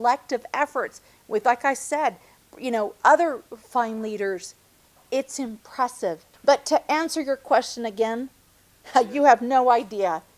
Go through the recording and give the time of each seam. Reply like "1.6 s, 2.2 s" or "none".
6.3 s